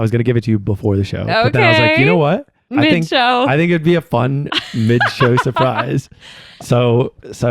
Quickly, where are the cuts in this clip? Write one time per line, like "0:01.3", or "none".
0:02.6
0:06.5